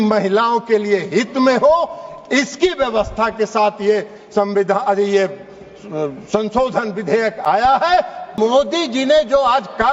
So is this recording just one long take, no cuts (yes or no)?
no